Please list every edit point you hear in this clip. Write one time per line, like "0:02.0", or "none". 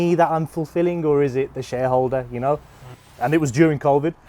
0:03.1